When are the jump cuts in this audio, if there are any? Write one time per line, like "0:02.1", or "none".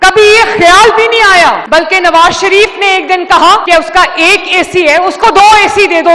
none